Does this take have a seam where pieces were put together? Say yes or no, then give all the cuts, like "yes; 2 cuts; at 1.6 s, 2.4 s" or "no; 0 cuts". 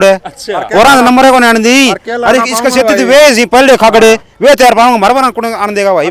no; 0 cuts